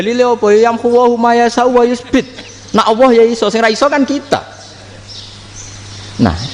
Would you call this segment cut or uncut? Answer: uncut